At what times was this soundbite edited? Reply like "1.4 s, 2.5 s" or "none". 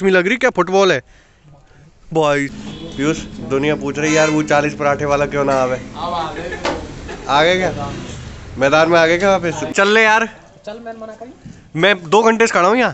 2.5 s, 9.7 s